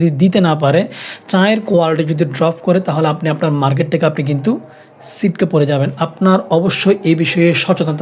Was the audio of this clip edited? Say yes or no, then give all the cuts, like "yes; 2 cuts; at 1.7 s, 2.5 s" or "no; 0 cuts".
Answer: no; 0 cuts